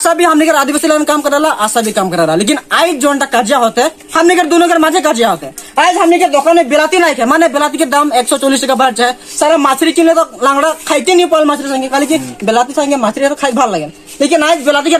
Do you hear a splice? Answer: no; 0 cuts

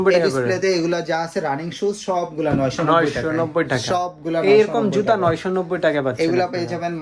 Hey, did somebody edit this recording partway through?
no; 0 cuts

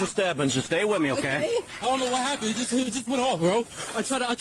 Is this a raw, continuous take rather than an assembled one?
no; 1 cut; at 1.7 s

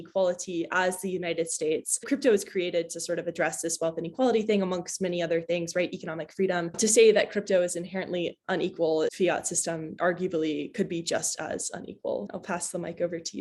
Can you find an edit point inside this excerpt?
no; 0 cuts

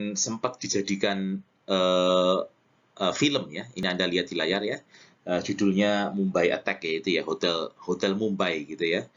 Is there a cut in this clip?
no; 0 cuts

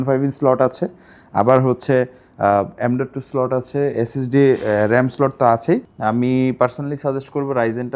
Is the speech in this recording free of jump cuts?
no; 1 cut; at 5.9 s

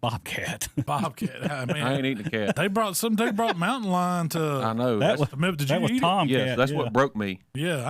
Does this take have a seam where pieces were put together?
yes; 2 cuts; at 0.9 s, 2.6 s

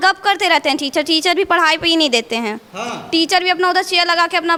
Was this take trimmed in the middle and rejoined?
no; 0 cuts

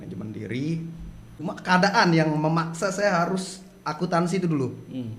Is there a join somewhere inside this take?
yes; 1 cut; at 1.4 s

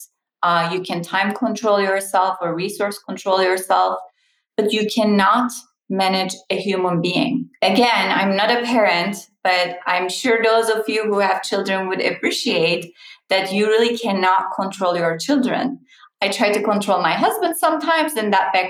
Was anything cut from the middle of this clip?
no; 0 cuts

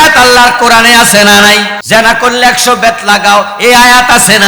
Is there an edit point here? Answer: yes; 1 cut; at 1.8 s

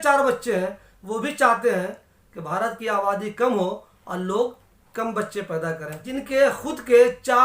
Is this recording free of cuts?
no; 1 cut; at 6.1 s

